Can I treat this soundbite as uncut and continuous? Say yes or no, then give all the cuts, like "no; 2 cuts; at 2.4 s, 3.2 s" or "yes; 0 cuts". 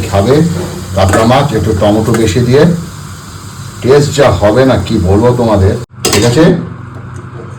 no; 1 cut; at 5.9 s